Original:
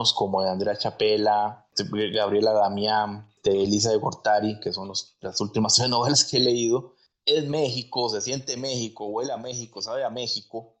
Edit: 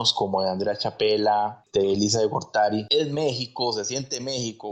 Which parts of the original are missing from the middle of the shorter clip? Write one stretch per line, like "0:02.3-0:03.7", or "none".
0:01.6-0:03.3
0:04.6-0:07.2